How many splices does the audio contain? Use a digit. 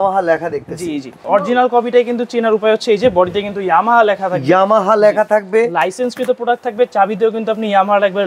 1